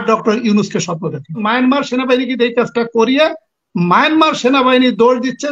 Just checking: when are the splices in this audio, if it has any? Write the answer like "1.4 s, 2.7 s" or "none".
1.4 s